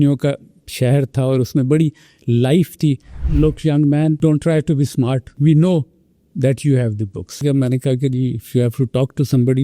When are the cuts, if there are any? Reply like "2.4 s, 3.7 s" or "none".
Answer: 3.1 s, 4.2 s, 5.3 s, 7.4 s